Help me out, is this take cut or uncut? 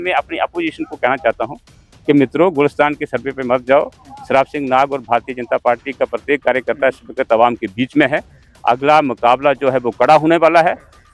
uncut